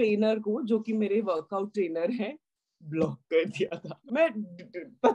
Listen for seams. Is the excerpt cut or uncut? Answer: cut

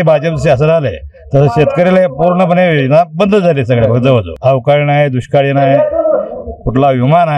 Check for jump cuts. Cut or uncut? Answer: cut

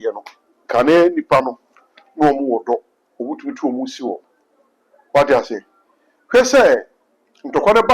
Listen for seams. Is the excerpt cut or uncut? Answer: uncut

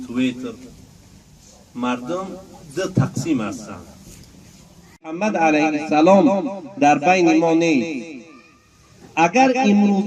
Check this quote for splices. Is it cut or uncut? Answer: cut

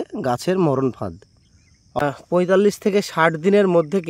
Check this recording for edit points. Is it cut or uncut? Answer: cut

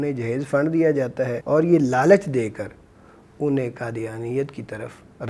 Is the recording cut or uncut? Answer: cut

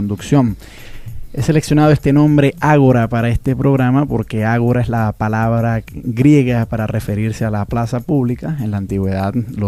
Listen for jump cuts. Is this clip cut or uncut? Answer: uncut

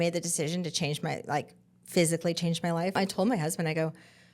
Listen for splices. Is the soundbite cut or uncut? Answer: cut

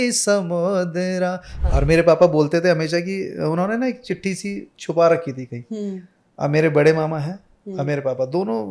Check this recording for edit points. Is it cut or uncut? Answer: cut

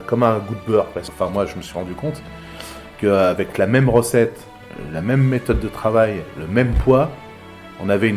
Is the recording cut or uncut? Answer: cut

